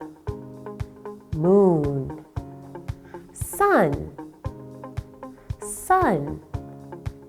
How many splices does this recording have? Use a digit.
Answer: 1